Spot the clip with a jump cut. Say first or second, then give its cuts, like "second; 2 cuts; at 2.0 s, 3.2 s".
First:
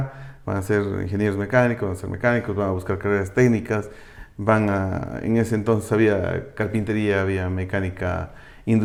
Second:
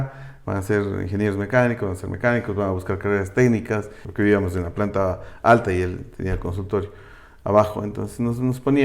second; 1 cut; at 4.0 s